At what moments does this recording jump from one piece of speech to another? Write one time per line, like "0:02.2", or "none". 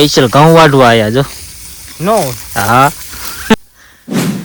0:03.5